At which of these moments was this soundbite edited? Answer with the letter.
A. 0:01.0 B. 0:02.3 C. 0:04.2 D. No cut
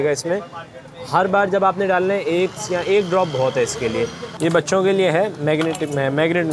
C